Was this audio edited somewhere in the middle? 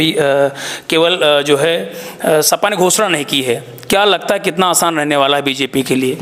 no; 0 cuts

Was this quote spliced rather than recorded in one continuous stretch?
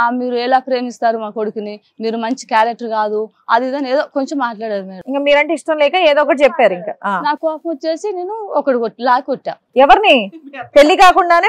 no; 0 cuts

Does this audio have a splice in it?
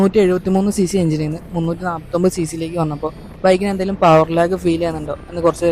no; 0 cuts

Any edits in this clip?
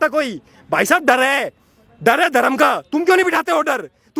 no; 0 cuts

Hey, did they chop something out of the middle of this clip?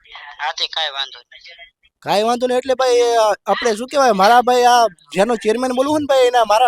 no; 0 cuts

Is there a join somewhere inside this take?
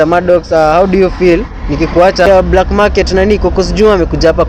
yes; 1 cut; at 2.3 s

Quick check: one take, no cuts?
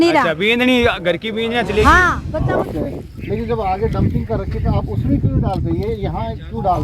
no; 1 cut; at 2.3 s

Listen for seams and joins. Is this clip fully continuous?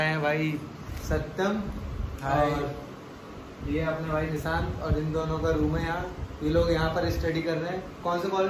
yes; 0 cuts

